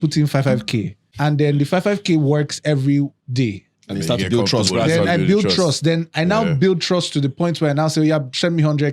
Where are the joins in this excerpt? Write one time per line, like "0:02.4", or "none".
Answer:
0:01.0